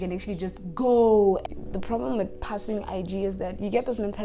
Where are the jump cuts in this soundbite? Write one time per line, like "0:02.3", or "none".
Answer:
0:01.4